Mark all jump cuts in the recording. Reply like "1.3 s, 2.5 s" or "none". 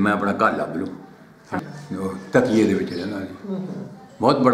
1.6 s